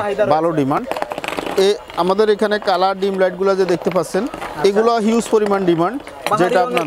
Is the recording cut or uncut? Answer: uncut